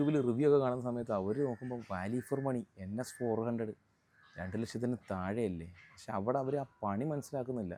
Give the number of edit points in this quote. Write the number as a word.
zero